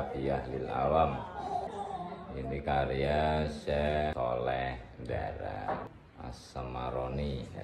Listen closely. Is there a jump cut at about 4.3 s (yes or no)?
no